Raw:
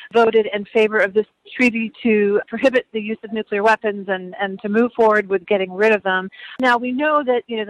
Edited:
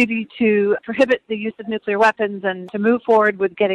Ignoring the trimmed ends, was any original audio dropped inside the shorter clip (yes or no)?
yes